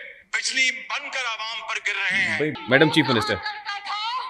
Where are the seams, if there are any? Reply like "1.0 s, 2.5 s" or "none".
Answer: 2.5 s